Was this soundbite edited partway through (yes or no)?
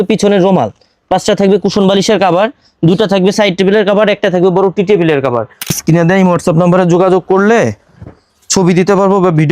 yes